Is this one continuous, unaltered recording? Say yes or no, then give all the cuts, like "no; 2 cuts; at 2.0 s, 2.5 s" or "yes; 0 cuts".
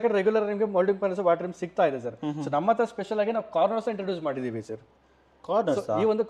yes; 0 cuts